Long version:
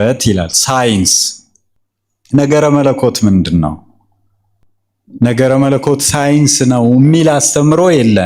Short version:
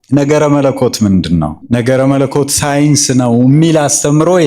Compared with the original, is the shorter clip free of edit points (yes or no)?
no